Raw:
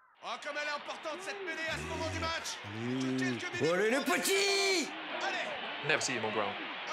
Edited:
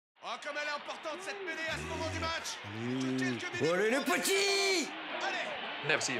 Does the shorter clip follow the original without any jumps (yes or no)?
yes